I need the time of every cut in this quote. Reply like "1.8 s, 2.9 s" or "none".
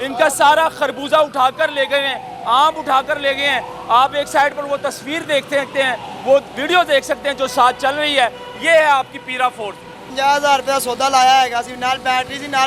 10.0 s

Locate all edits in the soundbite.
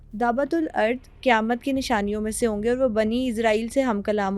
none

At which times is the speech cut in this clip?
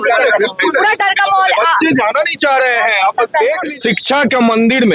3.6 s

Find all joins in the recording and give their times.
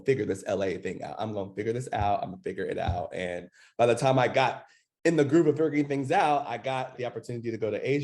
none

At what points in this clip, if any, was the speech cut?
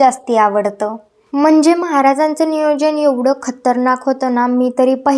1.1 s

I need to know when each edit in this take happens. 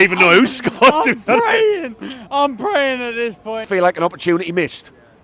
3.7 s

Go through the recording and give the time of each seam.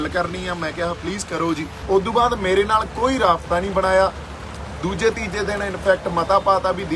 1.7 s

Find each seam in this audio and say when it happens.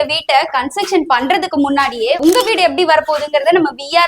none

